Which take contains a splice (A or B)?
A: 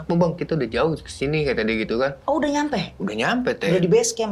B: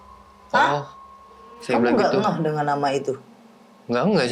B